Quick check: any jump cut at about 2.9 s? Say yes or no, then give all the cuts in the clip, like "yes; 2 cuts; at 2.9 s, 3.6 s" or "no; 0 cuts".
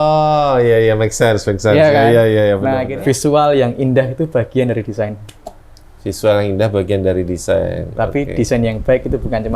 yes; 1 cut; at 2.9 s